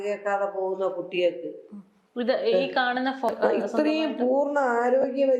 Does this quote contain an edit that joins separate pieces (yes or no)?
yes